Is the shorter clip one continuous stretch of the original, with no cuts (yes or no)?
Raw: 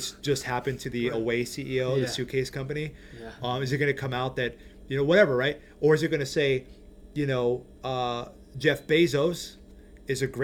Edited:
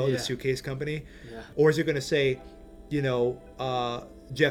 no